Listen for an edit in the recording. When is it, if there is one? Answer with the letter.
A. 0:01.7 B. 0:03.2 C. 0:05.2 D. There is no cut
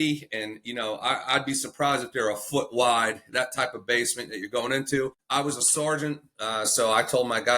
C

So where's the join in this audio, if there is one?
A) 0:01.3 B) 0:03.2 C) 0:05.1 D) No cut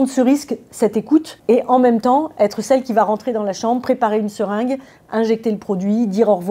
A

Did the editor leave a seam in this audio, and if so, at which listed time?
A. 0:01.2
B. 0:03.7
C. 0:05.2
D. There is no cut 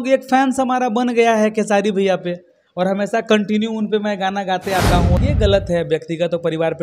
C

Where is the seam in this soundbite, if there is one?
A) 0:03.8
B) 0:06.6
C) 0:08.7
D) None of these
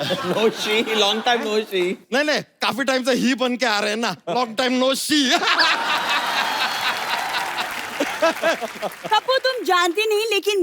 C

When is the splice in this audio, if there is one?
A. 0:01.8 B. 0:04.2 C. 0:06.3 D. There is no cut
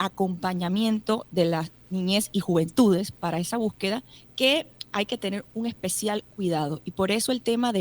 B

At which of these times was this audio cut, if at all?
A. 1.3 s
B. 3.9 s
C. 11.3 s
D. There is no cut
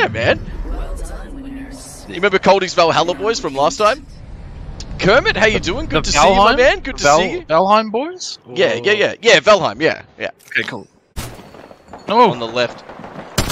C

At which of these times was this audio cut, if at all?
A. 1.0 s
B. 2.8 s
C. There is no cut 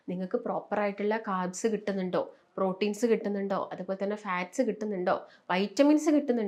C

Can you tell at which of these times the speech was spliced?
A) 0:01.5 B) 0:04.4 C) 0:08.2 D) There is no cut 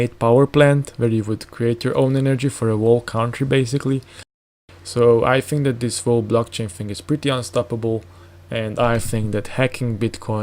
B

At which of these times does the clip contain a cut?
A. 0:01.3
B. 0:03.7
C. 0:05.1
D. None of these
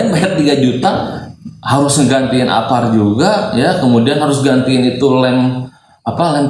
D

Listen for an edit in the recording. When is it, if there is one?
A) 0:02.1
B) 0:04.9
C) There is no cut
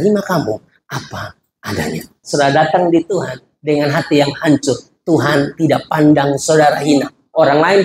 A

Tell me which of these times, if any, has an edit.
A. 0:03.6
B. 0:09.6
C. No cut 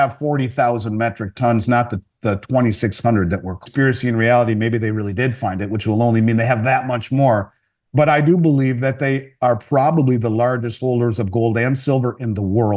A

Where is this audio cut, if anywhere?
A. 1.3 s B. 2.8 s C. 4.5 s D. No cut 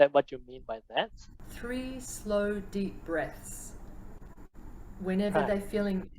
A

